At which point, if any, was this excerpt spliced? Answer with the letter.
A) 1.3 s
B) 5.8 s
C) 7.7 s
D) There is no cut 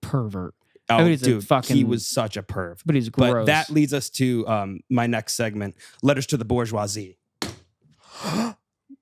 C